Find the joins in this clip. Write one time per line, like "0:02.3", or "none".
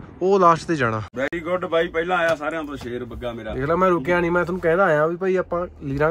0:01.1